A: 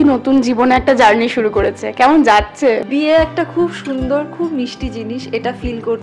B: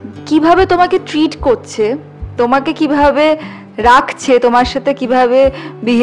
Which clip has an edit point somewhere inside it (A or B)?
A